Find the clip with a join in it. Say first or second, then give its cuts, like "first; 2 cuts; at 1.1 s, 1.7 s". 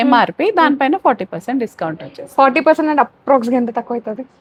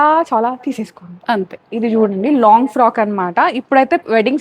second; 1 cut; at 1.6 s